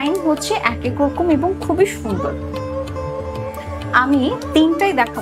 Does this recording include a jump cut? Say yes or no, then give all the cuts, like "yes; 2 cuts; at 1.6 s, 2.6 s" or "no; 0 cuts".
no; 0 cuts